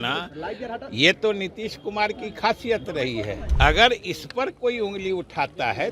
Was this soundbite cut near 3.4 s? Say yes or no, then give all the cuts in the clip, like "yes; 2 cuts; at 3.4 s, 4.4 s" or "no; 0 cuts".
yes; 1 cut; at 3.4 s